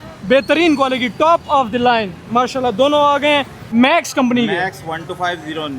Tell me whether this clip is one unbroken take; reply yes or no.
no